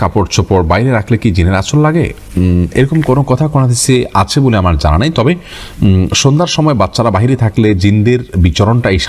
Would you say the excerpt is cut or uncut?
uncut